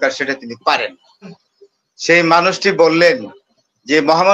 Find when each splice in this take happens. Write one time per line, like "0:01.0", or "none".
0:01.3